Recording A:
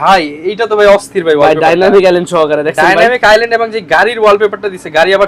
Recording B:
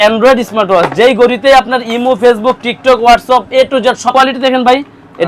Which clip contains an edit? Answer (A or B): B